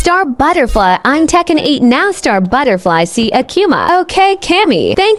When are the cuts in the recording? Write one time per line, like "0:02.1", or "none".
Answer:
none

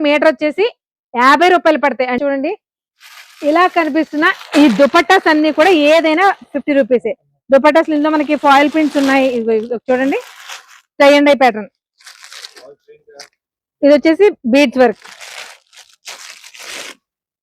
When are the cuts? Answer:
0:02.2

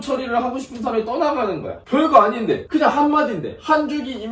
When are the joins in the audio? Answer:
0:02.6

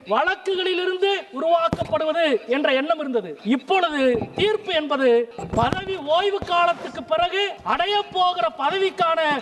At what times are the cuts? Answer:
0:03.3
0:05.4
0:07.6

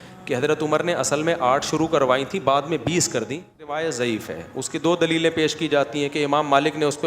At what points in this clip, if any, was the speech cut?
0:03.7

